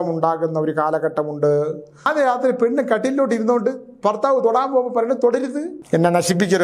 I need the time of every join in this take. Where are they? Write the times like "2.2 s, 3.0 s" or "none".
2.1 s, 5.7 s